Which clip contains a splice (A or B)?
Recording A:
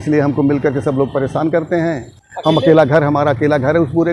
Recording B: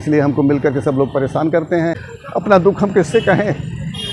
B